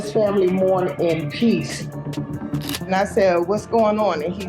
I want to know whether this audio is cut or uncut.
cut